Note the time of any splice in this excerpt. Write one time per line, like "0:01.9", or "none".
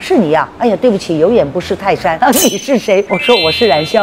0:02.1
0:03.1